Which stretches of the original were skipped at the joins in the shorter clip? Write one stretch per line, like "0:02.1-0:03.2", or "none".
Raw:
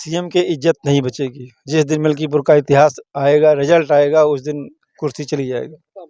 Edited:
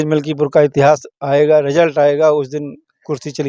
none